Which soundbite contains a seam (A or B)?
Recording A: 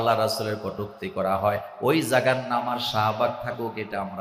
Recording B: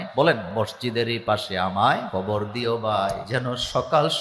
B